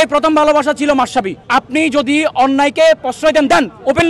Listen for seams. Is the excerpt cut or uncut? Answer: cut